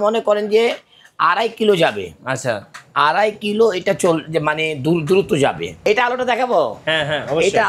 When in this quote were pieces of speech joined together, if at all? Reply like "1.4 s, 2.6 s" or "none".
5.8 s